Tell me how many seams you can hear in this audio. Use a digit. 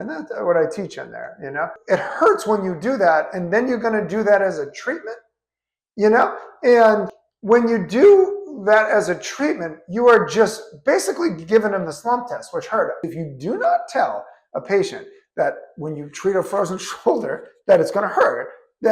2